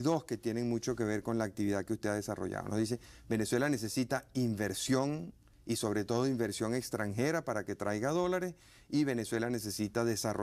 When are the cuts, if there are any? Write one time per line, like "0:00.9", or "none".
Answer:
0:03.1